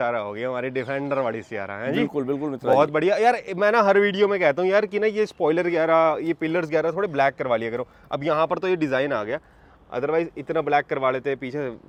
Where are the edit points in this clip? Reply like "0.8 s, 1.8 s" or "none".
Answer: none